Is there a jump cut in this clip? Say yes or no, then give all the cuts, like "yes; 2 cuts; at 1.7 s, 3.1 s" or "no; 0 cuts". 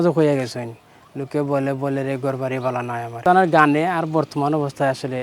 yes; 1 cut; at 3.2 s